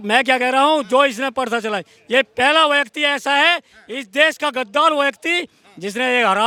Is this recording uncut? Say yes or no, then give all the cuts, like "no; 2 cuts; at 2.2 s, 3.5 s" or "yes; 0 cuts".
yes; 0 cuts